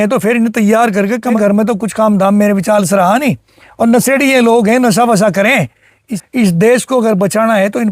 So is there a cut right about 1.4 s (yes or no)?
yes